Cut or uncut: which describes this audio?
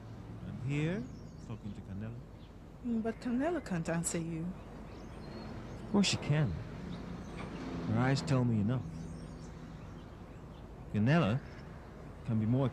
uncut